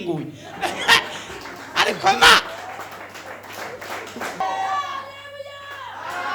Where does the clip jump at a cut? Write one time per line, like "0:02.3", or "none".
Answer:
0:04.4